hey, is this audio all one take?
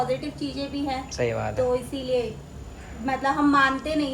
yes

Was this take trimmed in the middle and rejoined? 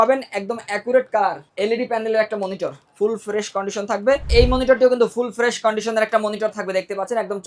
yes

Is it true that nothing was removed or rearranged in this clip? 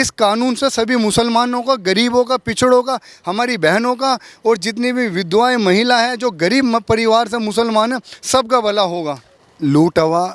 no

